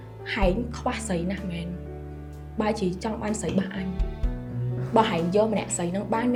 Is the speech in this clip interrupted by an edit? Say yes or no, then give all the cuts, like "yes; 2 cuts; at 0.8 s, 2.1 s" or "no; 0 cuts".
no; 0 cuts